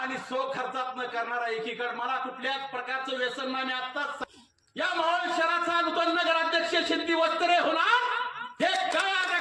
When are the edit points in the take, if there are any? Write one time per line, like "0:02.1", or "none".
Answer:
0:04.2